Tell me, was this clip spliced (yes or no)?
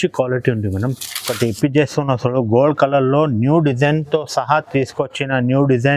yes